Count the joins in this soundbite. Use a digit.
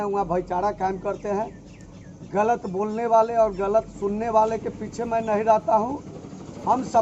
0